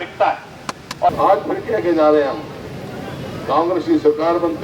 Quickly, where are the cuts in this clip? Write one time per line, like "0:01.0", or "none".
0:01.1

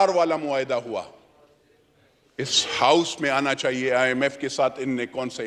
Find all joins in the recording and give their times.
none

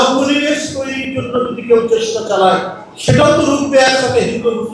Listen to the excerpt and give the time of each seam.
none

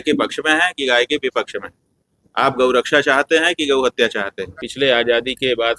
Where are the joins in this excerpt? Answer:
0:04.6

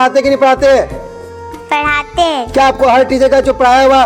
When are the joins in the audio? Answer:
none

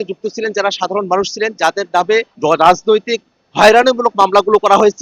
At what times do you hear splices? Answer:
0:02.3

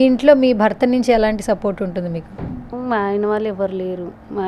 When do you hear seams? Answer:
none

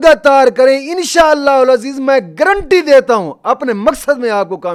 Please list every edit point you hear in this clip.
none

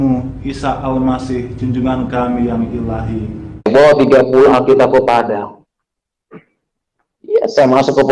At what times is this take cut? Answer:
0:03.7

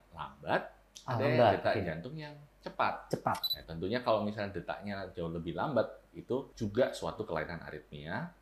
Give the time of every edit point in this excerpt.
0:03.5
0:06.5

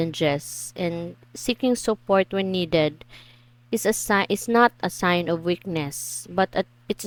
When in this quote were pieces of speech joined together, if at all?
none

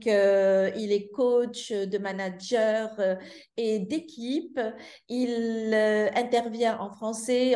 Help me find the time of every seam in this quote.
none

